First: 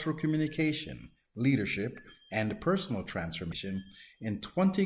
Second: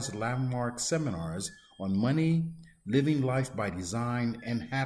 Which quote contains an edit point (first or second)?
first